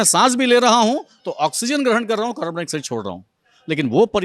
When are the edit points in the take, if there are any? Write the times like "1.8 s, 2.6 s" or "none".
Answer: none